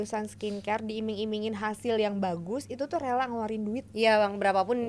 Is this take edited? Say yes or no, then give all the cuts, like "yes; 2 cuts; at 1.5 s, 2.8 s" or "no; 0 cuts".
no; 0 cuts